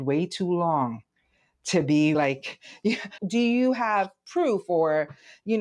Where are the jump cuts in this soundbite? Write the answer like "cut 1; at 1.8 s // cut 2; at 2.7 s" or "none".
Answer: cut 1; at 3.2 s